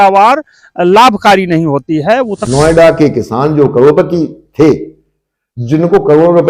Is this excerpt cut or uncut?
cut